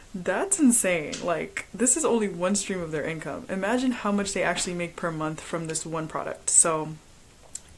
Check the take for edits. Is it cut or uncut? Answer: uncut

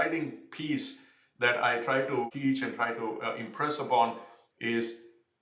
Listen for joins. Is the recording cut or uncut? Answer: cut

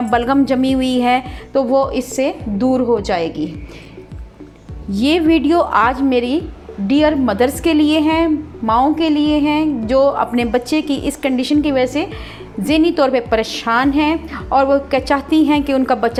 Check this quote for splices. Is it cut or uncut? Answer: uncut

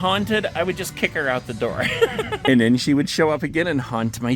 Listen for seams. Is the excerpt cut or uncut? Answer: cut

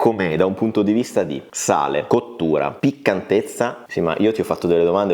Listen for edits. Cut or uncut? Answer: cut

